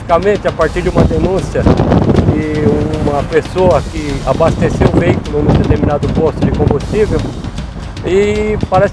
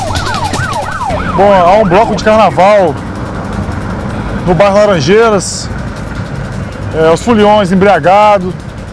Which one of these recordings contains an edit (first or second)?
second